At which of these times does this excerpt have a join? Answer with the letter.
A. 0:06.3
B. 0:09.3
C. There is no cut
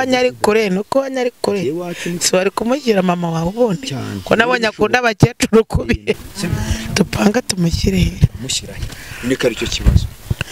A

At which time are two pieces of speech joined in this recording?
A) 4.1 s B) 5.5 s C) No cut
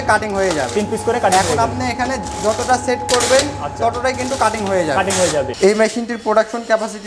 B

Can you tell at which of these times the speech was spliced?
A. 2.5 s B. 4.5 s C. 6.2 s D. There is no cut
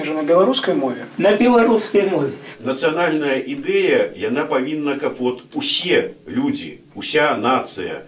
A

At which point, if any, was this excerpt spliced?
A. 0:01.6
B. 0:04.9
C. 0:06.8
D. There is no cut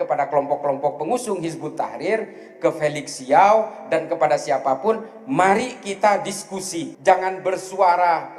C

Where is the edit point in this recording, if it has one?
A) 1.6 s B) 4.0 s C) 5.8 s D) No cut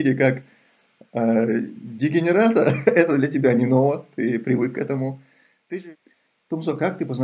C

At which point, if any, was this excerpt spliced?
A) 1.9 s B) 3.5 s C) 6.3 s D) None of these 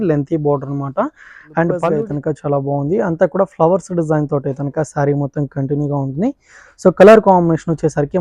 A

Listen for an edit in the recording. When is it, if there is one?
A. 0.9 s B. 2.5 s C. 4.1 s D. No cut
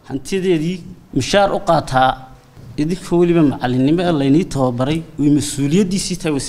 A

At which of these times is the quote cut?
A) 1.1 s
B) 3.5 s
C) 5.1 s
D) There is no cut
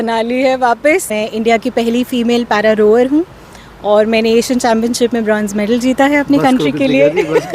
A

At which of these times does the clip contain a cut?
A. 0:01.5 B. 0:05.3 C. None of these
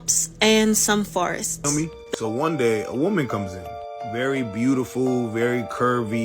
A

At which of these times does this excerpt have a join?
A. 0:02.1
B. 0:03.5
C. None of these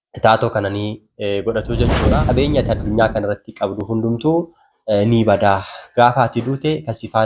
A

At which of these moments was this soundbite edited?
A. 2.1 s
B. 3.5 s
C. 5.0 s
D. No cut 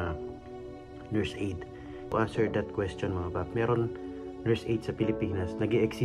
A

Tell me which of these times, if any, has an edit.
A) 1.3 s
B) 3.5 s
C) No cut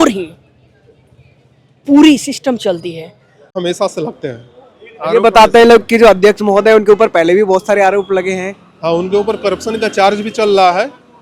B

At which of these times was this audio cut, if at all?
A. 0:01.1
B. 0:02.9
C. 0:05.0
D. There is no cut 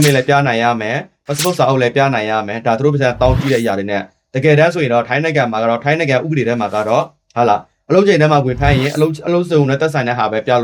D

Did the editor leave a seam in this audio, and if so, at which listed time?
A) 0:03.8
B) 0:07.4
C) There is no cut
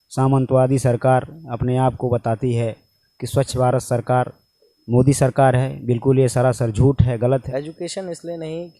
B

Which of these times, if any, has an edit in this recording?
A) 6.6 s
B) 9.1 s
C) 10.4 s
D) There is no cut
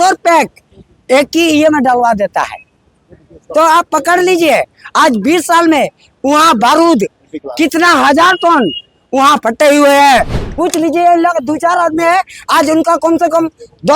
C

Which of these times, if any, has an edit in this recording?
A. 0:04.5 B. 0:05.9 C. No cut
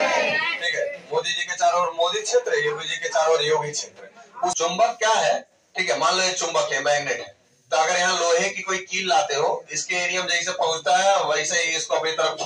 A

